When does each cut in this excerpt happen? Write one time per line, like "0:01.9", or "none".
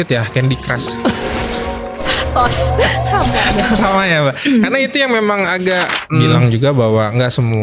0:06.4